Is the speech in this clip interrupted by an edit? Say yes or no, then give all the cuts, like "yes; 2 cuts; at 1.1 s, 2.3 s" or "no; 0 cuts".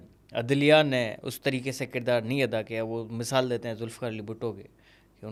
no; 0 cuts